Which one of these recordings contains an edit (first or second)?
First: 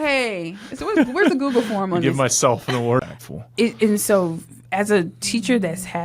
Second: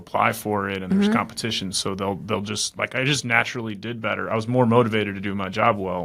first